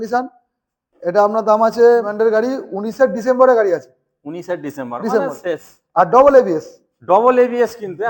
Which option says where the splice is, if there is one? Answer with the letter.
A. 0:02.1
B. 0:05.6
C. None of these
A